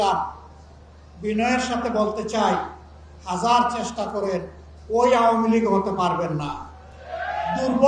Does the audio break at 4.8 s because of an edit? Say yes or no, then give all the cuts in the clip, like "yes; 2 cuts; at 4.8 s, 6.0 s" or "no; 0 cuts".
no; 0 cuts